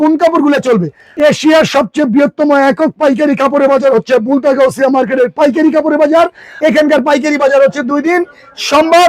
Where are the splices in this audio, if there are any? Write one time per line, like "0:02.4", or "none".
0:01.0
0:06.5